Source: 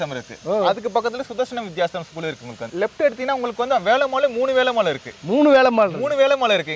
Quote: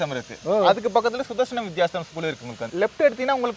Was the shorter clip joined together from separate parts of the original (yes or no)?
no